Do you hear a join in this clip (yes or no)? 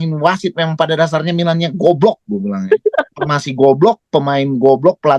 no